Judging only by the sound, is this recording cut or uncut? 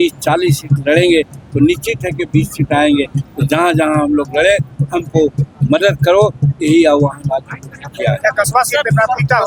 uncut